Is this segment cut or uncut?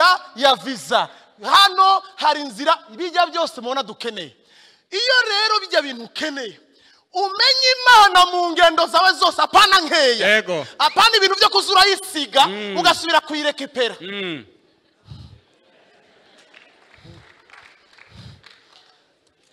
uncut